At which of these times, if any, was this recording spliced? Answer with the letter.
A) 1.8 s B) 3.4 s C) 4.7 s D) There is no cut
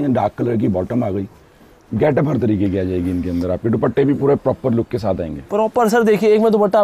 D